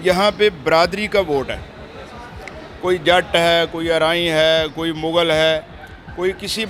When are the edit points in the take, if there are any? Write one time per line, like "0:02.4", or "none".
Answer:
none

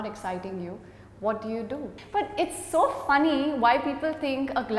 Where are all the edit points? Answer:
0:01.9

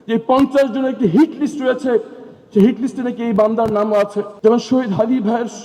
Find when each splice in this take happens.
0:04.3

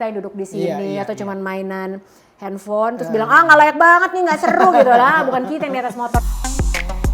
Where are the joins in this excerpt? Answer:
0:06.2

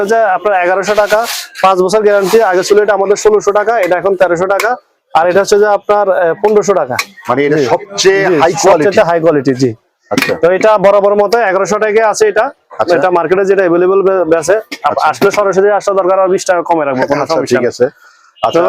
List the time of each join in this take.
none

